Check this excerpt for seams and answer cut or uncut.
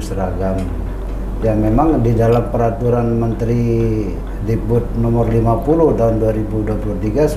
uncut